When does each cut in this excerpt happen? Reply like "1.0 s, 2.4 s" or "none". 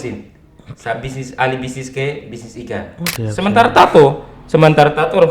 3.1 s